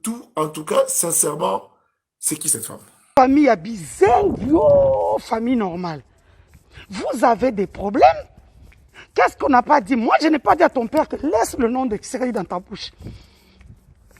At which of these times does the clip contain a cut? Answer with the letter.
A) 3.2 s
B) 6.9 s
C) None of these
A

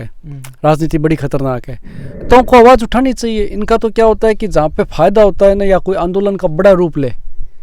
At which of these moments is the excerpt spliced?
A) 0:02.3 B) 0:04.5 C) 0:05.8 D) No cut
A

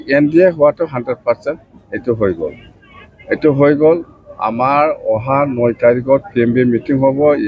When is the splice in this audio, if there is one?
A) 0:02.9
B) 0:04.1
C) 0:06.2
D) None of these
D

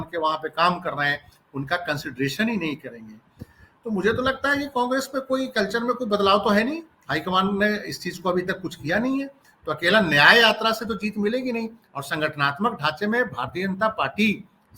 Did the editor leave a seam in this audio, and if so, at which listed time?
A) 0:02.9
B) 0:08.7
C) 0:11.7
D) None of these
D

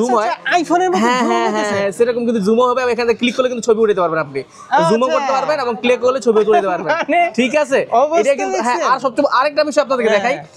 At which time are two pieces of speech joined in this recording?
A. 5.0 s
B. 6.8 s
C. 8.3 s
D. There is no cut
D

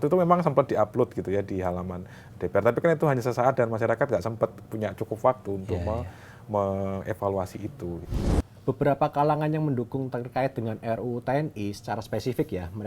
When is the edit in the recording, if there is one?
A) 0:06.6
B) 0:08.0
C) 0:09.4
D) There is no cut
B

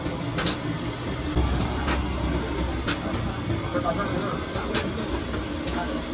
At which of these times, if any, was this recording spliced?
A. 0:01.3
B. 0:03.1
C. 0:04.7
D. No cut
A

